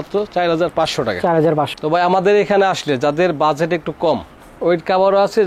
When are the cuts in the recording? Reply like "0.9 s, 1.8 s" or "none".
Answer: 1.7 s